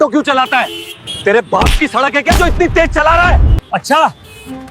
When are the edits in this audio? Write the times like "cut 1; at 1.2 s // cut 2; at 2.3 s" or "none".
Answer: cut 1; at 3.5 s